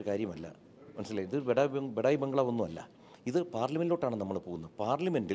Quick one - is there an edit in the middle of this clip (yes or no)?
no